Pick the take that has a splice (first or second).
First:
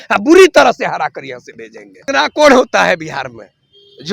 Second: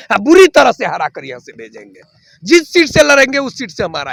first